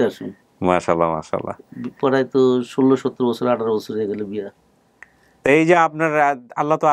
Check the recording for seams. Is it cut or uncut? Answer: uncut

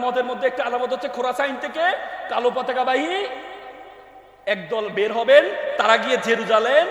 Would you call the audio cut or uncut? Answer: uncut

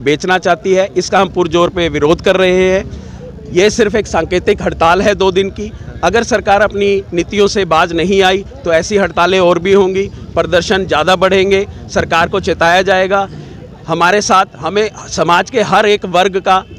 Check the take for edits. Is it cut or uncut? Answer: uncut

